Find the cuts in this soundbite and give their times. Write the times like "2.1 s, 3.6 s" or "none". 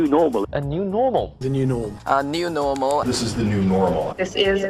none